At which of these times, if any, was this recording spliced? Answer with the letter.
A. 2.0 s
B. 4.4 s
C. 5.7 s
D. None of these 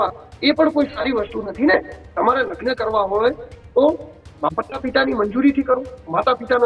D